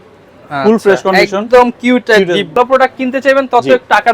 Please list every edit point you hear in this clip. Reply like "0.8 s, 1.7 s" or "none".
2.6 s